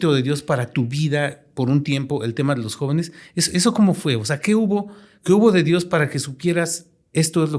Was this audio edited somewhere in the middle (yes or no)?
no